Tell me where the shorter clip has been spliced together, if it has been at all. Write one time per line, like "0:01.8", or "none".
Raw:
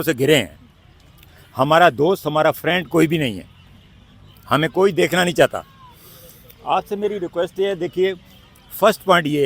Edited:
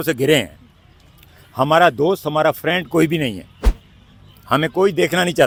none